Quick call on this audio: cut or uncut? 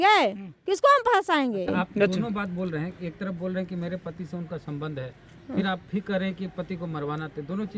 uncut